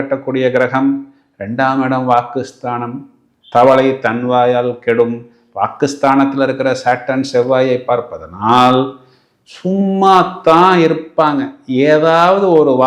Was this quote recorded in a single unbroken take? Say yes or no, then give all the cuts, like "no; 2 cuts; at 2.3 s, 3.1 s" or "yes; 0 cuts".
yes; 0 cuts